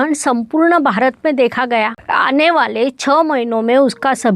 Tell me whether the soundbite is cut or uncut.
cut